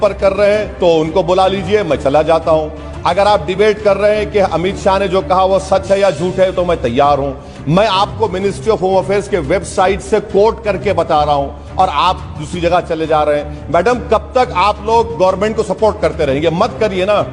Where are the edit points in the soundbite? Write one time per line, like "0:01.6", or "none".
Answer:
none